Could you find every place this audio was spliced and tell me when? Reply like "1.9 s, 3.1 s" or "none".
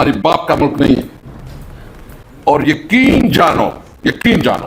none